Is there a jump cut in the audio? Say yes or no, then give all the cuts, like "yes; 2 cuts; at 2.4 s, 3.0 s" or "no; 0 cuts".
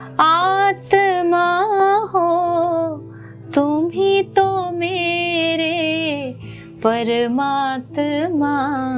no; 0 cuts